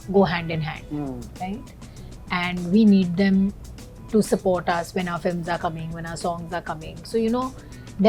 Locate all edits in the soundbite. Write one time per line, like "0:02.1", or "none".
none